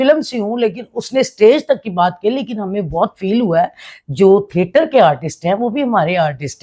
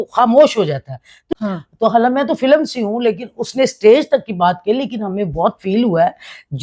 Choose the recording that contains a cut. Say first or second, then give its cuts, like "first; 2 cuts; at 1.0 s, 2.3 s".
second; 1 cut; at 1.2 s